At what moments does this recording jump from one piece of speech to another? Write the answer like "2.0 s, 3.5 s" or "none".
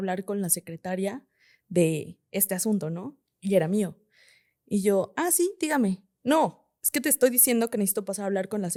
none